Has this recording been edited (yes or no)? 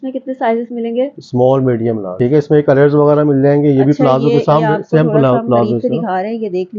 yes